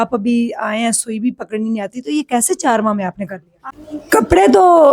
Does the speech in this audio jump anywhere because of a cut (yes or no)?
yes